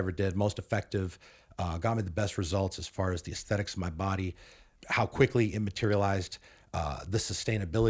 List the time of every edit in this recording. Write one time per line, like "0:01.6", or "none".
none

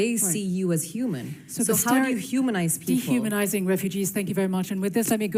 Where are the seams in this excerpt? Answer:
none

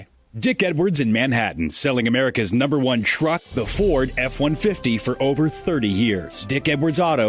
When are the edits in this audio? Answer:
0:06.4

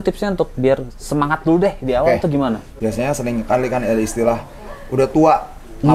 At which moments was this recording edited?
0:02.8

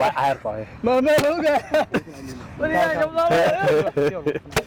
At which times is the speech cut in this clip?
none

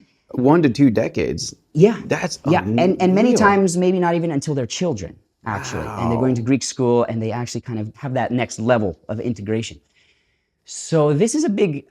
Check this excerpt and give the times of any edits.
0:08.0

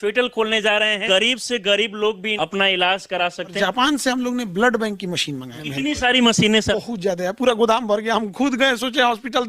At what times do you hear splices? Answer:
0:01.0
0:02.3
0:03.5
0:05.6
0:06.7

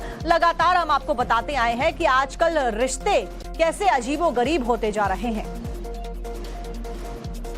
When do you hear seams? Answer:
0:02.7

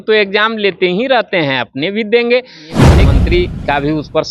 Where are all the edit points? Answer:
0:02.9

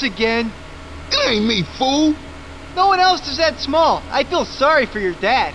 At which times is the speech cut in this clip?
none

